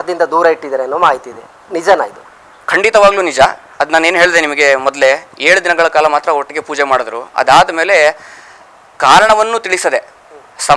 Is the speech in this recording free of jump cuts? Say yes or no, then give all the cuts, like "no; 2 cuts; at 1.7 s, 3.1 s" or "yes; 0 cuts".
yes; 0 cuts